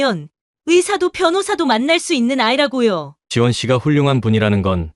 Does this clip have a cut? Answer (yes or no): yes